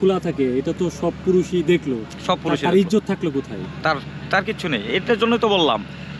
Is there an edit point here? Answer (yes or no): no